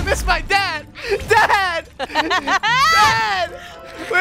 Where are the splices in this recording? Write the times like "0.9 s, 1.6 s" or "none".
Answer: none